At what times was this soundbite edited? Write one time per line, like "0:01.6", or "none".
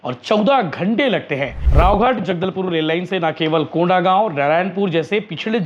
0:01.6